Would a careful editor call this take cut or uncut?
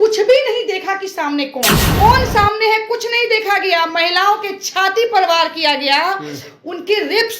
cut